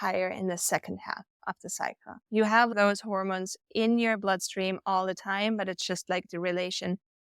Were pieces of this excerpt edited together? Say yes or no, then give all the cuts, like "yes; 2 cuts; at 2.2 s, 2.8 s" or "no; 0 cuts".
no; 0 cuts